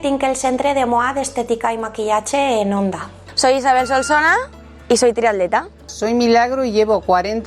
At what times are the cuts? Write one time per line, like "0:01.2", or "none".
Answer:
0:03.3
0:05.8